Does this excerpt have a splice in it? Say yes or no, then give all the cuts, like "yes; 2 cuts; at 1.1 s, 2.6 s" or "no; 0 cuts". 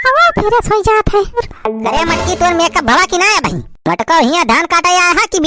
yes; 1 cut; at 1.5 s